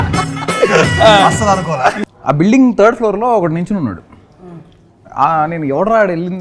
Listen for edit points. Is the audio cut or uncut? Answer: cut